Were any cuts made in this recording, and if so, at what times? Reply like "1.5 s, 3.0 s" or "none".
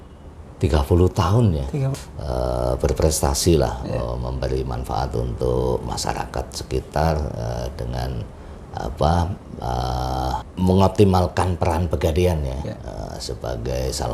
1.9 s, 10.5 s